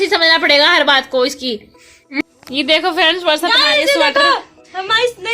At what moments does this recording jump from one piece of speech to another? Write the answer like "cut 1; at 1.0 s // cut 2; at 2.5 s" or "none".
cut 1; at 2.2 s

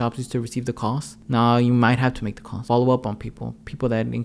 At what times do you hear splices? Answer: cut 1; at 1.2 s // cut 2; at 2.6 s

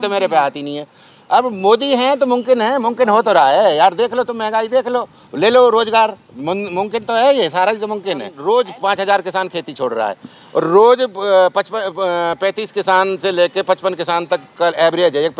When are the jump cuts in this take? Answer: cut 1; at 8.3 s

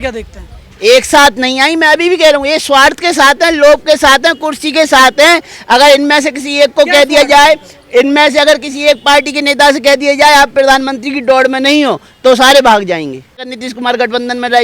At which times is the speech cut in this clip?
cut 1; at 13.6 s

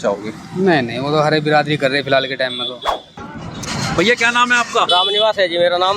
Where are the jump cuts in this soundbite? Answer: cut 1; at 3.2 s

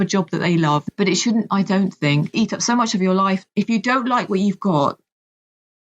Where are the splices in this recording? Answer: cut 1; at 0.8 s // cut 2; at 2.3 s // cut 3; at 3.4 s

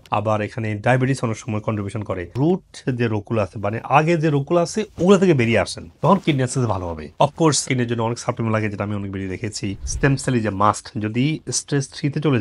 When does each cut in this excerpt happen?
none

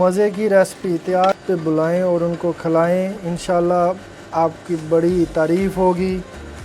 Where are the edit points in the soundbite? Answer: cut 1; at 1.3 s

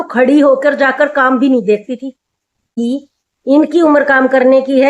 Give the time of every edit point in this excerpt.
cut 1; at 2.8 s

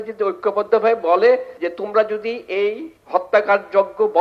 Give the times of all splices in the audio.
cut 1; at 1.6 s // cut 2; at 2.9 s

